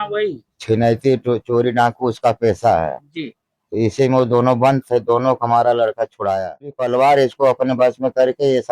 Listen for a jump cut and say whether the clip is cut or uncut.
cut